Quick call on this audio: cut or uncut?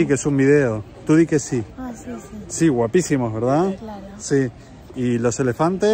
uncut